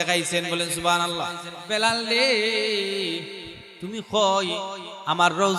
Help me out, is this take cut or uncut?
cut